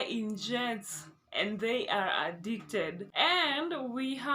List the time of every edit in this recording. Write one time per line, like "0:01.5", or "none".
0:03.0